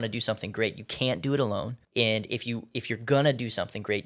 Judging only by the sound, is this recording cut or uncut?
cut